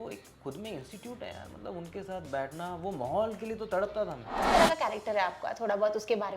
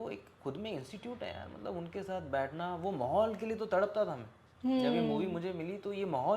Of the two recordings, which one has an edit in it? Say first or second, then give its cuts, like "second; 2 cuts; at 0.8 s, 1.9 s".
first; 1 cut; at 4.5 s